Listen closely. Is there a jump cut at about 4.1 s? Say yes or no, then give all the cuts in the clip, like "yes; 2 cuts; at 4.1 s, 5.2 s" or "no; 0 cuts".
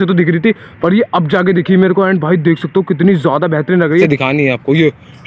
yes; 1 cut; at 4.1 s